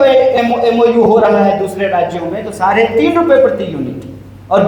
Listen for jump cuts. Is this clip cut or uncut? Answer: uncut